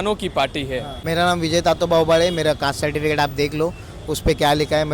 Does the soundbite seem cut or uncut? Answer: cut